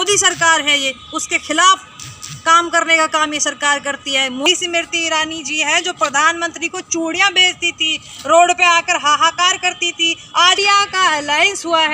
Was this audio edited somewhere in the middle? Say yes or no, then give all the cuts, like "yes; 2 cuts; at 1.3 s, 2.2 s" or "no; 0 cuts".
yes; 2 cuts; at 4.5 s, 10.6 s